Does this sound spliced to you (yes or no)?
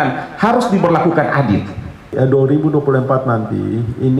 yes